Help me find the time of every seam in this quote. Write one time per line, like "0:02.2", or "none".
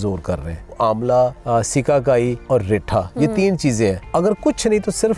0:00.7
0:01.4
0:02.4
0:04.0